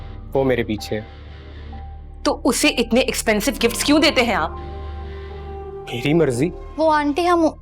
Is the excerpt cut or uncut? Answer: cut